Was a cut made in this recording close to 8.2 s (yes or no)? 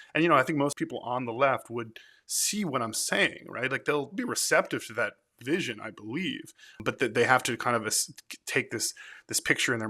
no